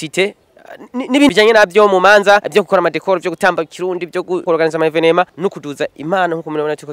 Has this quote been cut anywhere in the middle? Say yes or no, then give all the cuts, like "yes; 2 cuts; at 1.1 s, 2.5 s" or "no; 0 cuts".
yes; 4 cuts; at 1.3 s, 2.5 s, 4.5 s, 5.3 s